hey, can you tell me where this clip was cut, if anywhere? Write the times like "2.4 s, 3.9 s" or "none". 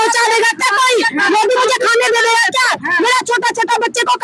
none